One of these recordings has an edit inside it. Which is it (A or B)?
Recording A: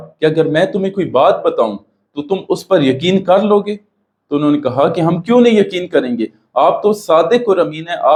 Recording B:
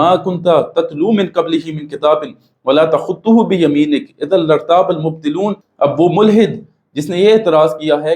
B